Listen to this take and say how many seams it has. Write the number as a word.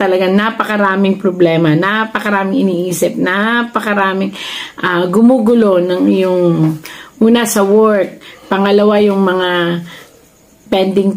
zero